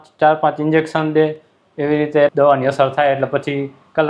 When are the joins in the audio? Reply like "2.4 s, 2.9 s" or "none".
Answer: 2.3 s